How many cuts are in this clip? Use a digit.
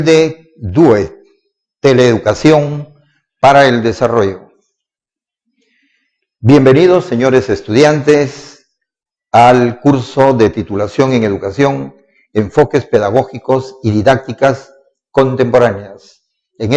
0